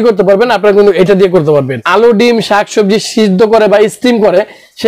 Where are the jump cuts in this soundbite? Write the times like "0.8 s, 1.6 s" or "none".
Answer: 1.8 s